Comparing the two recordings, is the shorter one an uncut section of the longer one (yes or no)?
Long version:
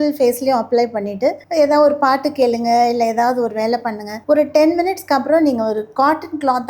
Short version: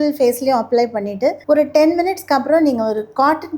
no